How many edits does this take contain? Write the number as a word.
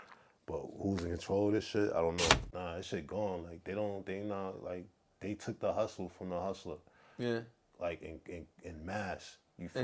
one